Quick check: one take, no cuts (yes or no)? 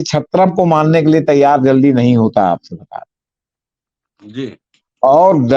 yes